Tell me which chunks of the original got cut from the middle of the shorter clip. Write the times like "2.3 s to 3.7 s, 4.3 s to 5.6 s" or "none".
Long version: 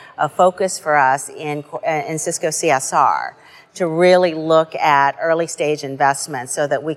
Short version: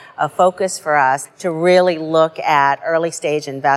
1.3 s to 3.7 s